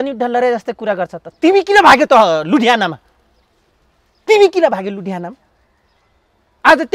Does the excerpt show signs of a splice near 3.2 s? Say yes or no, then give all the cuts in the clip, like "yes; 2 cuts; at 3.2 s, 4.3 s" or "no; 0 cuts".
no; 0 cuts